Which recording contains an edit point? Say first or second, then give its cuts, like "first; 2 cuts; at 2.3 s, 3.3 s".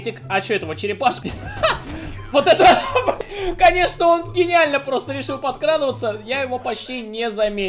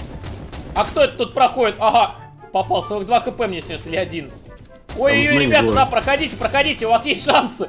first; 2 cuts; at 1.2 s, 3.2 s